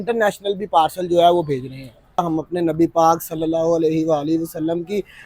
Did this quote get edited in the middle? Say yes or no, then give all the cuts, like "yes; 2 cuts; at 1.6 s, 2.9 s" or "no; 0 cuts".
yes; 1 cut; at 2.2 s